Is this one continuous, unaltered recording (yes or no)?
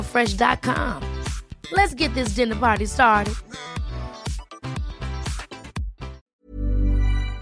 no